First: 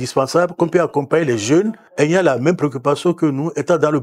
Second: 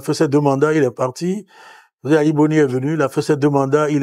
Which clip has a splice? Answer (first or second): first